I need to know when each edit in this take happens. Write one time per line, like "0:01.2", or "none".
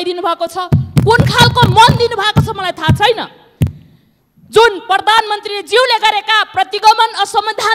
none